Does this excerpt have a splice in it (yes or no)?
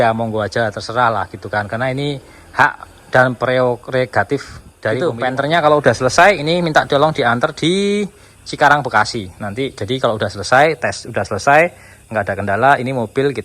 yes